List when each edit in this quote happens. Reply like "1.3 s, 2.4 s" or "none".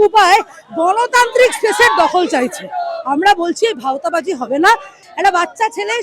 5.0 s

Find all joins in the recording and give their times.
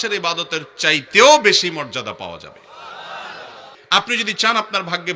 4.1 s

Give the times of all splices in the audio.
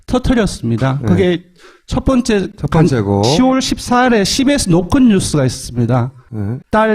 1.1 s

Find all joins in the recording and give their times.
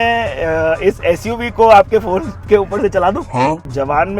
3.3 s

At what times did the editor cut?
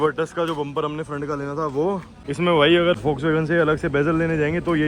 2.2 s, 3.0 s

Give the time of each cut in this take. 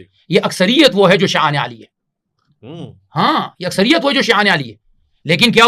none

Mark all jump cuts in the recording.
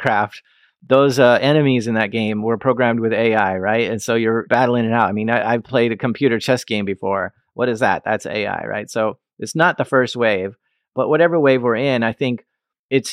5.6 s

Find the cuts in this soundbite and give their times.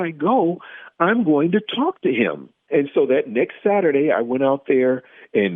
2.5 s

